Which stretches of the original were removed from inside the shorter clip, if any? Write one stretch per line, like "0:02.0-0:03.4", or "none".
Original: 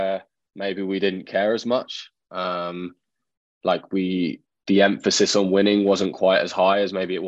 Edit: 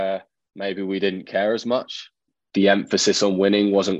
0:02.3-0:04.5